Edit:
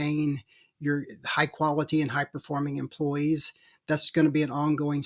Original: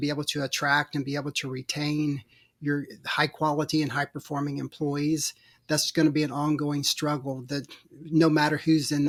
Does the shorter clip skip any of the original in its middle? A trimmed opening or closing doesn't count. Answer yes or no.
no